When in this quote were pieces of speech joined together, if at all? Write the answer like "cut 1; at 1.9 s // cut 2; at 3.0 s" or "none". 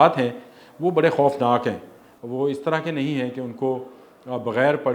none